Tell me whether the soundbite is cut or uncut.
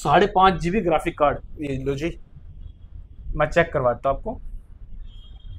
uncut